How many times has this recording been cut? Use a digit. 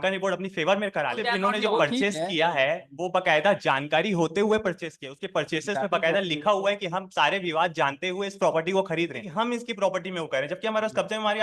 2